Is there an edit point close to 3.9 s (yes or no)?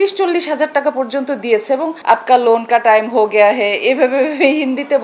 no